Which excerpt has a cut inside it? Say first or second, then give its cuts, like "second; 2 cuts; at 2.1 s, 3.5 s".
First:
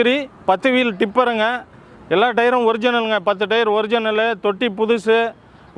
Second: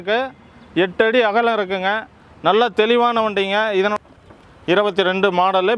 second; 1 cut; at 3.9 s